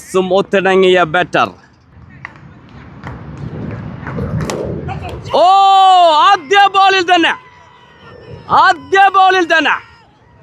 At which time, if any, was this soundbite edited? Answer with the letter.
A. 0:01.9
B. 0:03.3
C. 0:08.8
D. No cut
A